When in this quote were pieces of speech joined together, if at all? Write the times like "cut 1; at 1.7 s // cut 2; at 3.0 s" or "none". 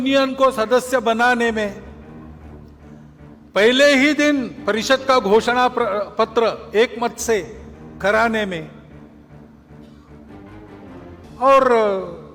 none